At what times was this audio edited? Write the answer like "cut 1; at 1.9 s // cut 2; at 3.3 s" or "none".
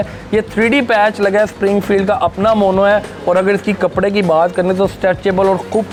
none